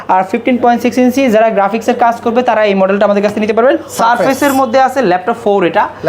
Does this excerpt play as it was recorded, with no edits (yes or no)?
no